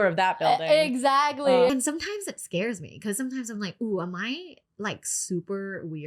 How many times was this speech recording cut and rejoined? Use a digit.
1